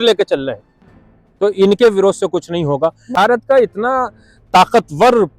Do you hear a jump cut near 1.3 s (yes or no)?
no